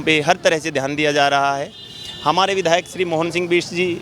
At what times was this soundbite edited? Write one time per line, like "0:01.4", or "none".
none